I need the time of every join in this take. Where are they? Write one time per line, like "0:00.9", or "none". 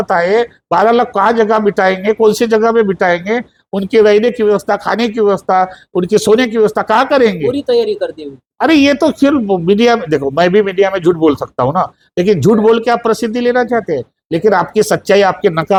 none